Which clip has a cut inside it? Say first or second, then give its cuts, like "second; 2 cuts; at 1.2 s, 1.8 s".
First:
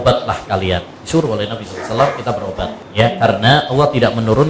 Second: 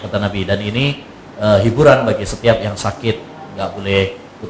first; 2 cuts; at 0.9 s, 2.8 s